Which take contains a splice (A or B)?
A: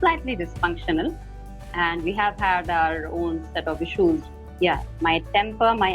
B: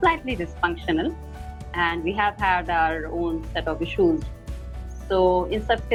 A